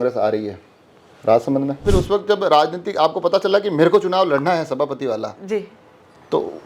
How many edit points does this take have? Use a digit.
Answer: 1